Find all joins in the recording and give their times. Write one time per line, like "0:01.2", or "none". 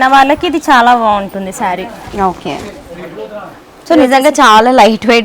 none